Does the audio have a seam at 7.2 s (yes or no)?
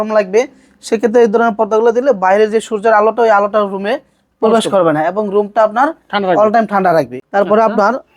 yes